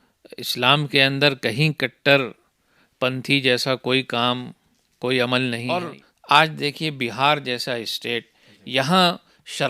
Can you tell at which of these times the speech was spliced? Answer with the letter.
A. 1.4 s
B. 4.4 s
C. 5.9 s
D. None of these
C